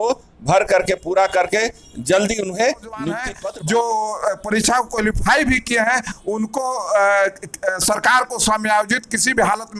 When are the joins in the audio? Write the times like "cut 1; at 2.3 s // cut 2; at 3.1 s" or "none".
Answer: cut 1; at 3.3 s